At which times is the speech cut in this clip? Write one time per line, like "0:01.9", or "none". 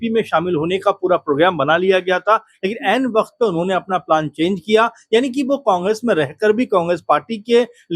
none